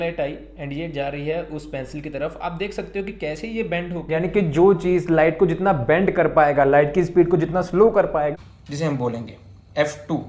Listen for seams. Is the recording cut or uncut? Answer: cut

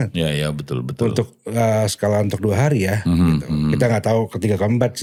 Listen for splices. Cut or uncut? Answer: uncut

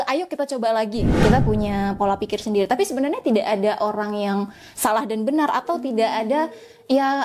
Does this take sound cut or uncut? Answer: cut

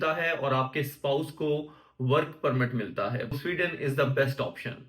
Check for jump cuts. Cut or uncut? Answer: cut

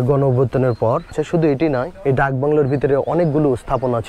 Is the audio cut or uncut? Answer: cut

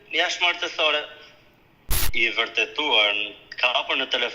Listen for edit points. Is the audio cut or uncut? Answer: cut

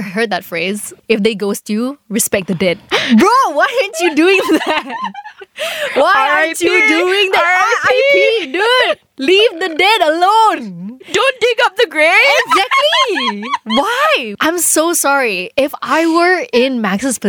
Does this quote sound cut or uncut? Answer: cut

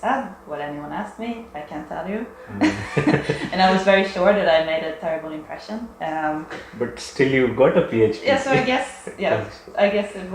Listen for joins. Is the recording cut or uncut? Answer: uncut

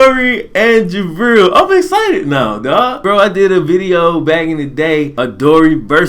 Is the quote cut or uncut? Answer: cut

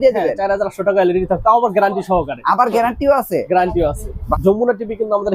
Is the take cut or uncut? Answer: cut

